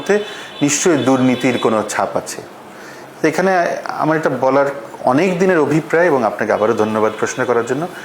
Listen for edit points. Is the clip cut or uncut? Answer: uncut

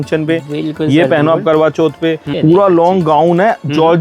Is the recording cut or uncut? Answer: cut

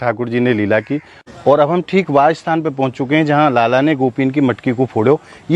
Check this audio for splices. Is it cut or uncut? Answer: cut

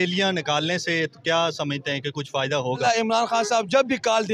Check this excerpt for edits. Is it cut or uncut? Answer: cut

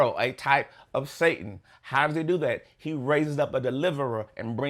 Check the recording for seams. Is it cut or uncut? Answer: uncut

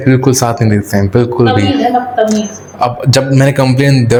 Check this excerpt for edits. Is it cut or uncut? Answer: uncut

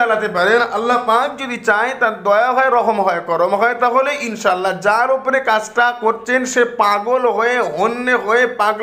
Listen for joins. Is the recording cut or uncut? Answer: uncut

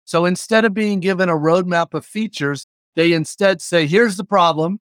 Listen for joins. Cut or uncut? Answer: cut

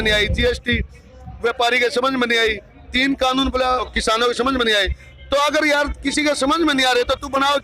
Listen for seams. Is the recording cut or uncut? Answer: cut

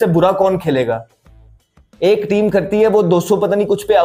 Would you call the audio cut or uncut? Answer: uncut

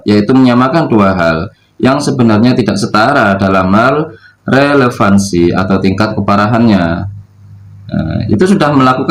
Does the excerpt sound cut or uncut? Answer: uncut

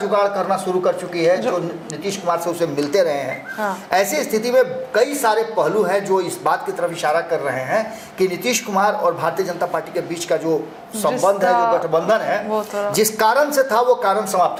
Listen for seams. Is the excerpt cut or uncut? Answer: uncut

